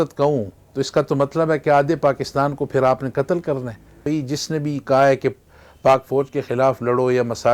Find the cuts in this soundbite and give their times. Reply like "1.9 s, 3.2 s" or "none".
4.0 s